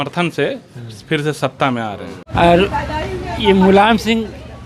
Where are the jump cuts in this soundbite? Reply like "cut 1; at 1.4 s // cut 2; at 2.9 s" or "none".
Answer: cut 1; at 2.2 s

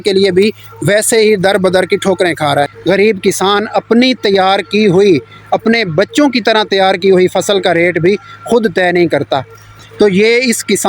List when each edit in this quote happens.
cut 1; at 2.8 s // cut 2; at 9.8 s

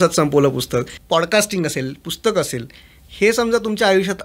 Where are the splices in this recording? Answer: cut 1; at 1.0 s

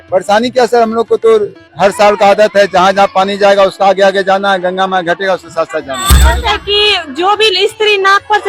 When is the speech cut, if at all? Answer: cut 1; at 6.1 s

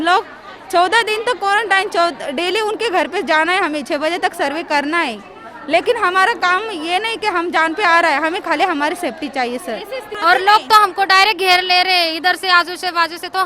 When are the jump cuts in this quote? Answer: cut 1; at 10.0 s

